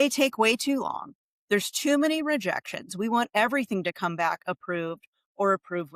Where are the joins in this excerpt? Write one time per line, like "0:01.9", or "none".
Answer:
none